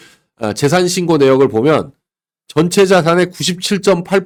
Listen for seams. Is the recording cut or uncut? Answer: uncut